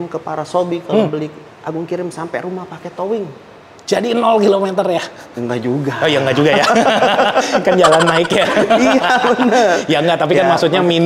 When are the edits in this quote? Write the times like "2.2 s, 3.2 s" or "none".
none